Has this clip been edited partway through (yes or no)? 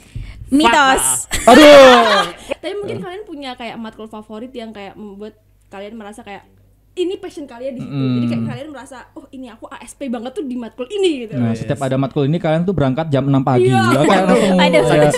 yes